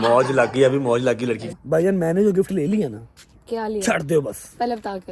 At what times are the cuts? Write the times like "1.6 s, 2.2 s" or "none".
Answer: 1.5 s